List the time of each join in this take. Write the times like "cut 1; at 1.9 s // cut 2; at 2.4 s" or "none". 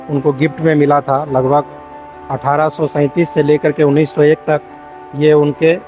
none